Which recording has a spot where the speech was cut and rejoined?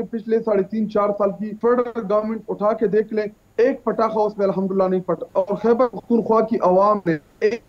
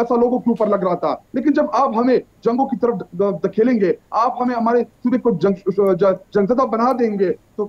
first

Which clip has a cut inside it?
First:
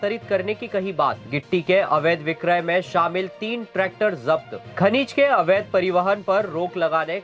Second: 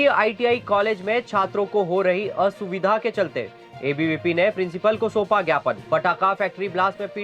first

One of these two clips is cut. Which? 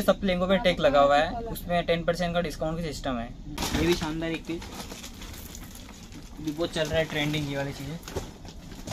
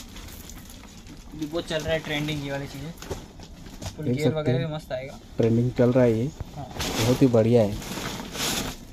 first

